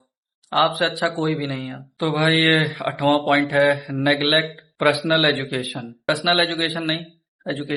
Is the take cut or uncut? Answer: uncut